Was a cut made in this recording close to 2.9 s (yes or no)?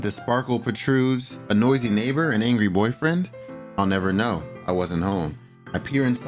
no